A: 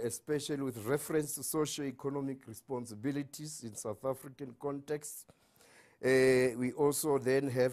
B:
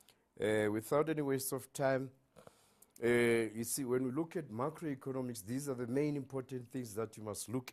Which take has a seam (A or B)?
A